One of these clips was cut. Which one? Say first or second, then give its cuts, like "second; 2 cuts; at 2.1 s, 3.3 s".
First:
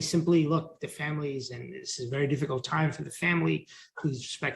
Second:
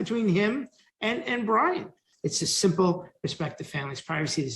second; 1 cut; at 2.0 s